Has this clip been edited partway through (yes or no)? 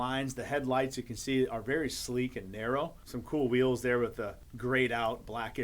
yes